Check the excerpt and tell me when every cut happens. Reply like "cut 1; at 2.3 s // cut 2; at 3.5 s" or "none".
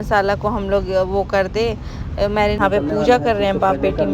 cut 1; at 2.6 s